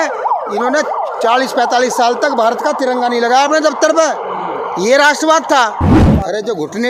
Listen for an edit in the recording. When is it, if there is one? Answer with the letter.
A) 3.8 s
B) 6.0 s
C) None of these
B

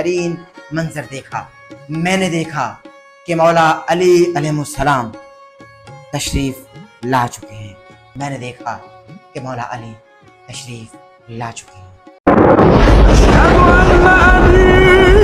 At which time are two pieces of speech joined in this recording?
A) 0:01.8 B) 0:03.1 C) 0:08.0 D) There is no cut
C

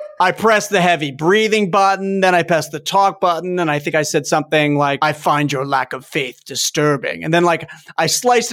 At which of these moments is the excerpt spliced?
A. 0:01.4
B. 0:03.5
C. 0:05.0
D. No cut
C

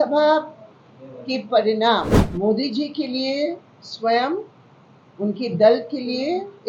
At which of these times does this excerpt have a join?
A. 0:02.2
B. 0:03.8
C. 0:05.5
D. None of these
A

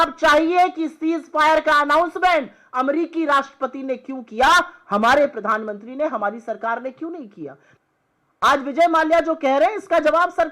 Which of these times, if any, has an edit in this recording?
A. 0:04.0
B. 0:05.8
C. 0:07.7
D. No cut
C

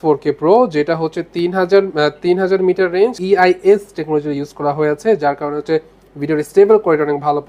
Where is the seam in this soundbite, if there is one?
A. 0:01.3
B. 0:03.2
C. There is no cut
B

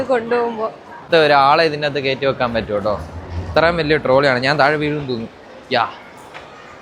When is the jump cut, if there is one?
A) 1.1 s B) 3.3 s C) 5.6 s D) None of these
A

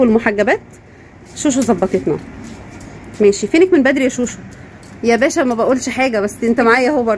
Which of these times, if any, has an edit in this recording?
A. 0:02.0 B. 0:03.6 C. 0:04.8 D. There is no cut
D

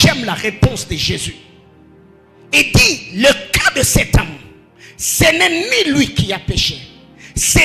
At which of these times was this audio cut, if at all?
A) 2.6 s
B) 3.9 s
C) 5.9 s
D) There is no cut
D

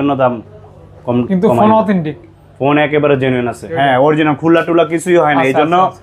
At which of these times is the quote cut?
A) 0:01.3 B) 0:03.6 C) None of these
B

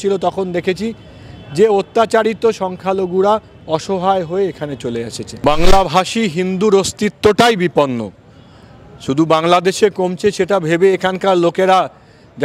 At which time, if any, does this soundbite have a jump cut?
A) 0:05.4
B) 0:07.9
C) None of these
A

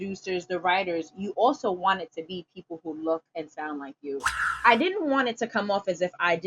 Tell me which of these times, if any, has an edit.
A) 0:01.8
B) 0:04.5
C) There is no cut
B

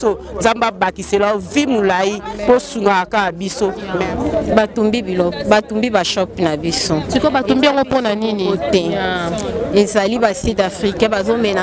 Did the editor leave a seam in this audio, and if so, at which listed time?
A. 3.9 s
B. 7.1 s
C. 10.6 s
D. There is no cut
A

